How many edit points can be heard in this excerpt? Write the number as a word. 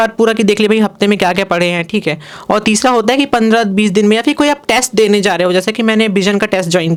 zero